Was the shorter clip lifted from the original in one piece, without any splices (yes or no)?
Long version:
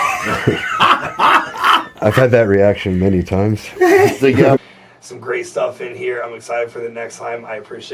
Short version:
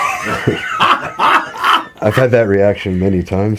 yes